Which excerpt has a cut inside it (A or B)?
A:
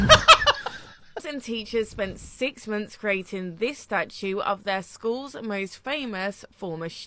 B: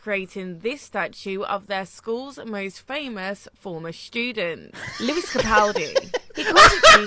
A